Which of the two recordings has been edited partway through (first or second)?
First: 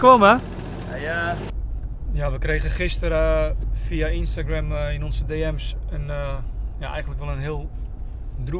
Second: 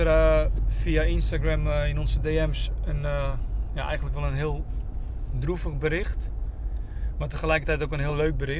first